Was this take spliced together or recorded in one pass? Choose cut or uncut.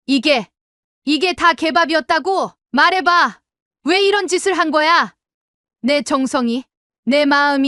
cut